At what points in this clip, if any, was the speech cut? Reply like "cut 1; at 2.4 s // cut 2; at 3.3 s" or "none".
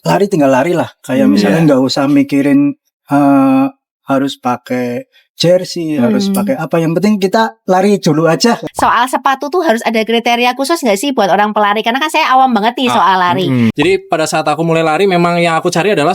cut 1; at 8.6 s // cut 2; at 13.7 s